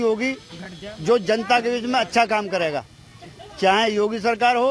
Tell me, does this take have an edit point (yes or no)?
no